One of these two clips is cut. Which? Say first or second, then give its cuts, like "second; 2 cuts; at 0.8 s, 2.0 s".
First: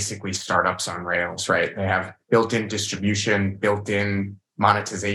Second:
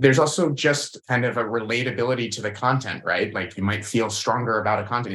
second; 1 cut; at 0.9 s